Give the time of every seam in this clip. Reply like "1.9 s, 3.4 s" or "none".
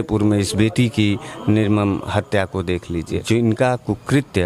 3.2 s